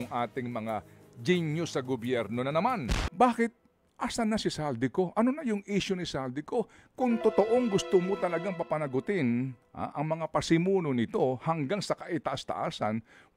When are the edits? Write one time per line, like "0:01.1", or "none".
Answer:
0:03.0